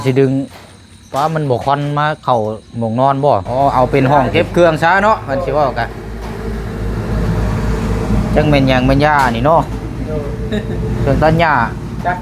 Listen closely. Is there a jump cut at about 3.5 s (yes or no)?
yes